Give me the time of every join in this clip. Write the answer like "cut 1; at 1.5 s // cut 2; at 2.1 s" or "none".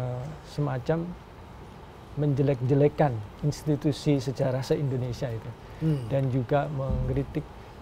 none

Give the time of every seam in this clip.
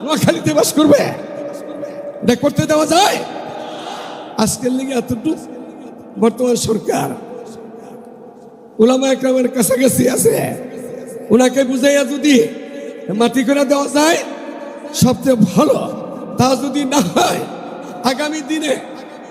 none

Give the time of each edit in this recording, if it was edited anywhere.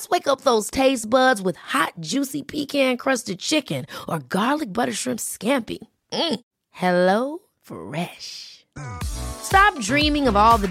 none

